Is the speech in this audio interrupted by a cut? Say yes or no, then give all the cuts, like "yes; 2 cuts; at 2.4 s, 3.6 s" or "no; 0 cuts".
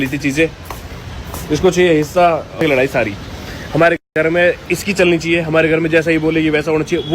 yes; 1 cut; at 2.6 s